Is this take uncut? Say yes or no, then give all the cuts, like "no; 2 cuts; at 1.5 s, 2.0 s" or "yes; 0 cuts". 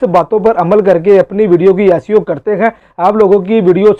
yes; 0 cuts